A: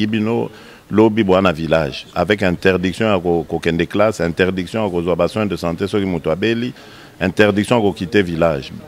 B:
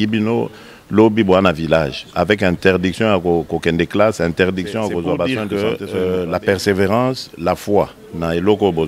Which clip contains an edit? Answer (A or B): B